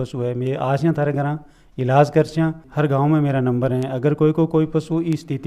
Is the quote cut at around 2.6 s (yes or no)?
yes